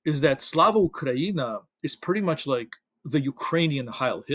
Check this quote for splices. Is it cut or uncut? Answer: uncut